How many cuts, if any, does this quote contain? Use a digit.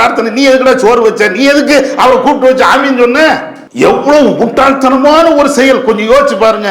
1